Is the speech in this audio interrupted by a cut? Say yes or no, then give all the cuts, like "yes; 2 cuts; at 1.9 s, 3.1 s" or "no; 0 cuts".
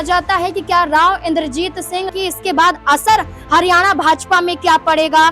yes; 1 cut; at 2.1 s